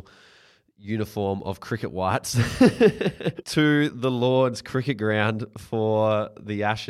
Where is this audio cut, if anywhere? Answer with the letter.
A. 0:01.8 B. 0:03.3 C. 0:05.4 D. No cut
B